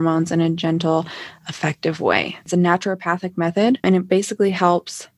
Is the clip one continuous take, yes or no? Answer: no